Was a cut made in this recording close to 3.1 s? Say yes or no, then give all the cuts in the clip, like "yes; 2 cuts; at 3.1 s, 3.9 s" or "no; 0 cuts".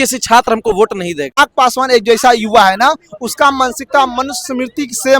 no; 1 cut; at 1.4 s